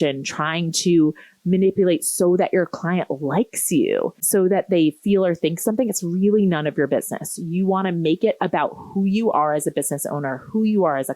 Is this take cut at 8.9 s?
no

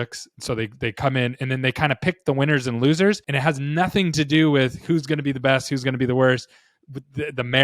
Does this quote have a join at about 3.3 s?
yes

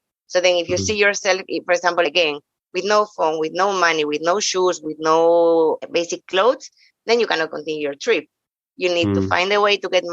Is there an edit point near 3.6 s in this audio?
no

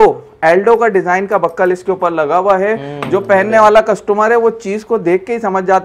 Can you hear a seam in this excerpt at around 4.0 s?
no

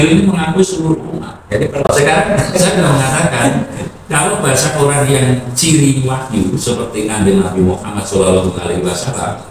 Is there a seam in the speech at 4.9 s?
no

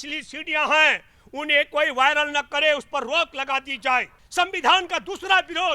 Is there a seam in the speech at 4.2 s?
yes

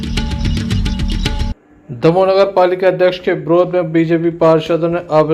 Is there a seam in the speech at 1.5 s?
yes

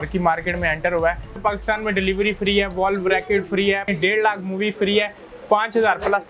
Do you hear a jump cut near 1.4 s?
yes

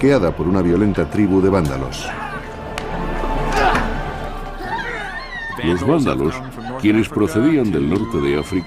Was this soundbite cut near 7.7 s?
yes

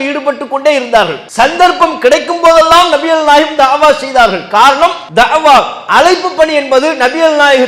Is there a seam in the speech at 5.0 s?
yes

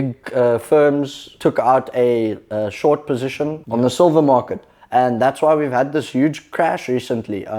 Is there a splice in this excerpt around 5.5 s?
no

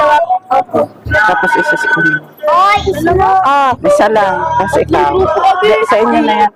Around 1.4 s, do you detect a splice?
no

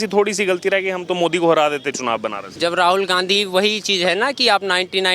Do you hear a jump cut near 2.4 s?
yes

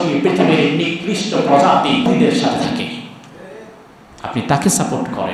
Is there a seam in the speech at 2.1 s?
yes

